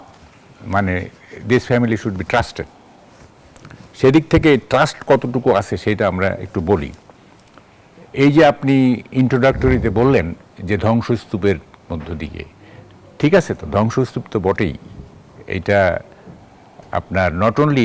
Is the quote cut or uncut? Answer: uncut